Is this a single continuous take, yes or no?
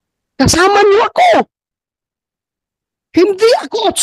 yes